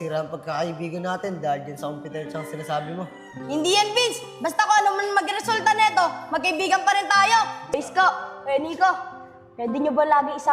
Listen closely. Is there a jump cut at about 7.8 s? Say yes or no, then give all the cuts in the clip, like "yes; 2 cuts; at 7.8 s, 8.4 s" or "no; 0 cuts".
yes; 1 cut; at 7.8 s